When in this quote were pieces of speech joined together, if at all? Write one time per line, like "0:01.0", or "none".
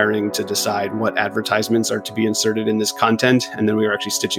none